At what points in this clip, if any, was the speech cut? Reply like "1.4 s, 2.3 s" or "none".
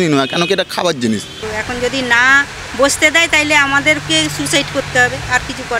1.5 s